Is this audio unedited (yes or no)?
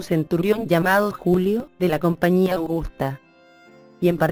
yes